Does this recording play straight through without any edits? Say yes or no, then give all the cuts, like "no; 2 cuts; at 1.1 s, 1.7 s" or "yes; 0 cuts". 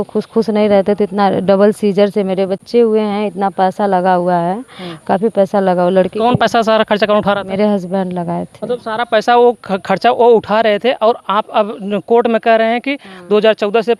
yes; 0 cuts